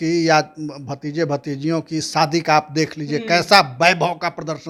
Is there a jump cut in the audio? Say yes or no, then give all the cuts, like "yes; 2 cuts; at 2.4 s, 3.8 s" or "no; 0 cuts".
no; 0 cuts